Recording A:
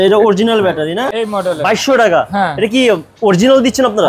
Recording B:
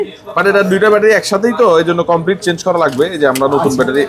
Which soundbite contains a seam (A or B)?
A